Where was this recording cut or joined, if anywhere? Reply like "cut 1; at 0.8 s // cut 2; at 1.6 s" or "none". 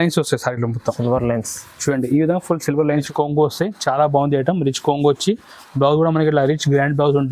cut 1; at 3.0 s